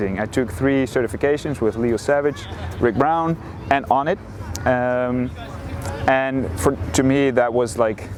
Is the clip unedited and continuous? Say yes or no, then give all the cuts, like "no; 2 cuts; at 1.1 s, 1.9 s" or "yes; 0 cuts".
yes; 0 cuts